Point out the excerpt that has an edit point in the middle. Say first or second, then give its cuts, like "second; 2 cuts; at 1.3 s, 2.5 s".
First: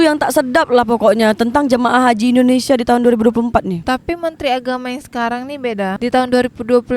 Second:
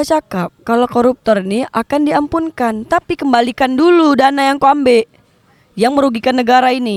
first; 2 cuts; at 3.8 s, 6.0 s